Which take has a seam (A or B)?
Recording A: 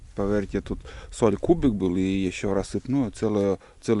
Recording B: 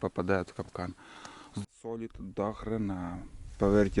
B